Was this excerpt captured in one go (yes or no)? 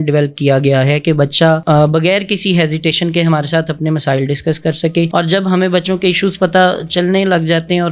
yes